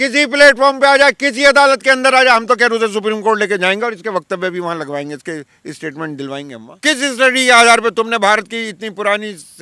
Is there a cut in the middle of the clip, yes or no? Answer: yes